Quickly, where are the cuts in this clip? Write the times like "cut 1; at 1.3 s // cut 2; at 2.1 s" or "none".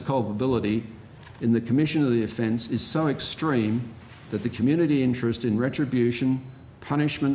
none

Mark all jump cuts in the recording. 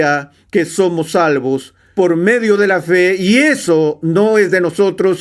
cut 1; at 1.8 s

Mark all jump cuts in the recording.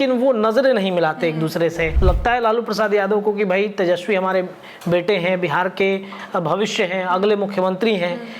cut 1; at 1.9 s

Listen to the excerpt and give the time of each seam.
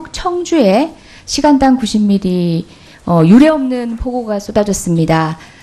cut 1; at 0.9 s

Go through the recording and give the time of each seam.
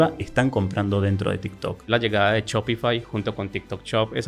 cut 1; at 1.9 s

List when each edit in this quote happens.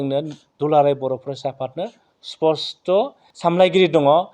cut 1; at 3.2 s

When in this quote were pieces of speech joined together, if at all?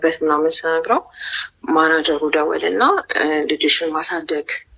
none

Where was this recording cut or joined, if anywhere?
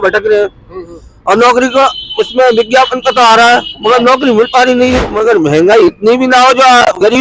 cut 1; at 5.1 s

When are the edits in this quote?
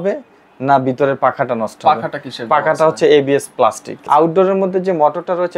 cut 1; at 3.9 s

